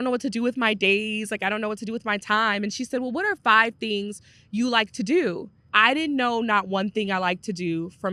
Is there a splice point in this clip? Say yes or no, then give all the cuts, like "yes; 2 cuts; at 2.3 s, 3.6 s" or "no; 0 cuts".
yes; 1 cut; at 5.5 s